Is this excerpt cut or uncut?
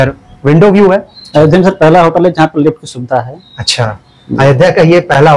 cut